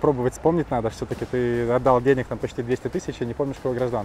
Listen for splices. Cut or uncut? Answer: uncut